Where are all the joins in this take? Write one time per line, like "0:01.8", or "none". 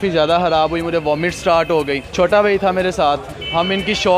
none